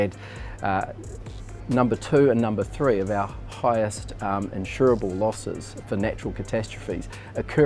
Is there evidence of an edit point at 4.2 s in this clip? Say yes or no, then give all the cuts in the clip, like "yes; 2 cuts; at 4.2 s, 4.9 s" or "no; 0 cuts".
no; 0 cuts